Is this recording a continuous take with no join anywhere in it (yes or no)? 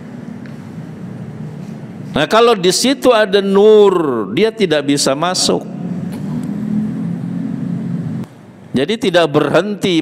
no